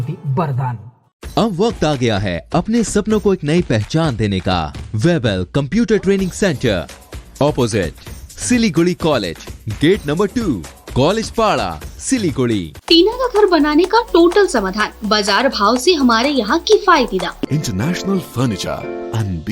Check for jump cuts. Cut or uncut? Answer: cut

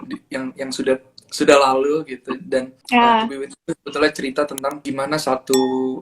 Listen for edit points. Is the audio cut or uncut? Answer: cut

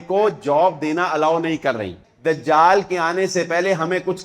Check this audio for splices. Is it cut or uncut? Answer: cut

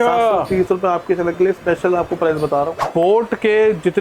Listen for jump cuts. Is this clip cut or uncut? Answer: cut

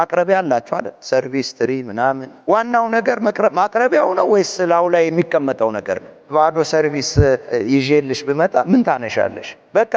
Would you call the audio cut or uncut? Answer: cut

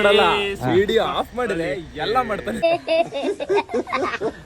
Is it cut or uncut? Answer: cut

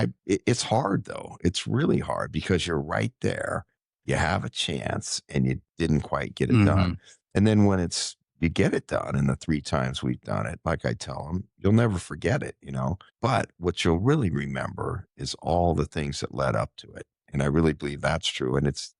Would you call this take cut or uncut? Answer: cut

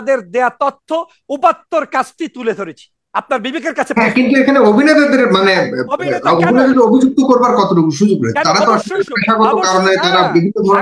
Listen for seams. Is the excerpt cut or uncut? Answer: uncut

